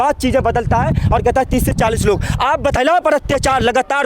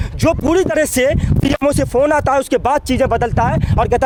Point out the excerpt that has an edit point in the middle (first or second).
first